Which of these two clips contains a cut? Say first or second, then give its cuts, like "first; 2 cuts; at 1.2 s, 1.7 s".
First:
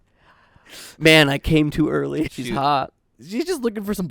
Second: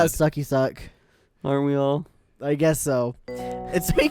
first; 1 cut; at 2.2 s